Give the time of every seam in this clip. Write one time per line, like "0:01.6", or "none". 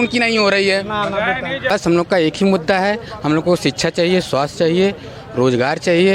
0:01.7